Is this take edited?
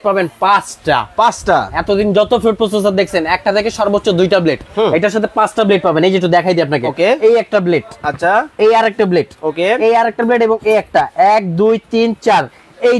no; 0 cuts

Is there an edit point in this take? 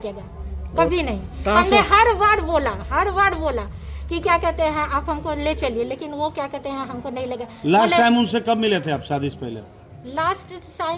no; 0 cuts

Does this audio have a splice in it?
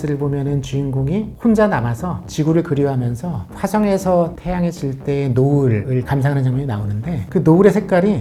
no; 0 cuts

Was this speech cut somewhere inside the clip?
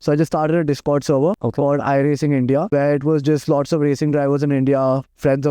yes; 2 cuts; at 1.4 s, 2.7 s

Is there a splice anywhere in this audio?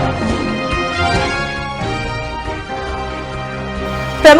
no; 0 cuts

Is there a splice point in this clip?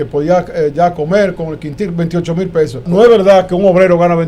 yes; 1 cut; at 2.9 s

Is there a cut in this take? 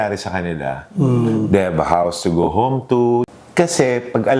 yes; 1 cut; at 3.3 s

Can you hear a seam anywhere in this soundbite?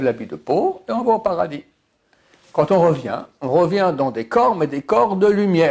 no; 0 cuts

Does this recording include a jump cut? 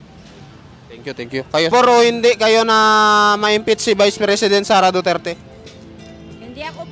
yes; 1 cut; at 1.7 s

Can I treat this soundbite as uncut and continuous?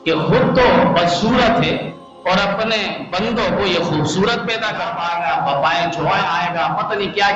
no; 1 cut; at 4.9 s

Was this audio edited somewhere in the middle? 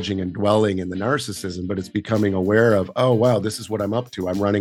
no; 0 cuts

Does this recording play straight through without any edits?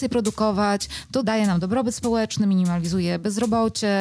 no; 1 cut; at 1.2 s

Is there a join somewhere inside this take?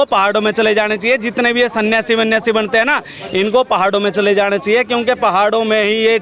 no; 0 cuts

